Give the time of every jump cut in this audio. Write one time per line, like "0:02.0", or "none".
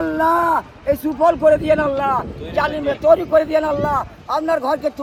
none